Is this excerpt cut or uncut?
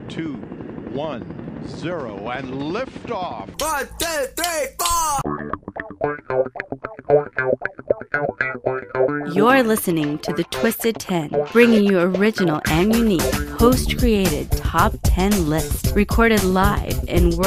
uncut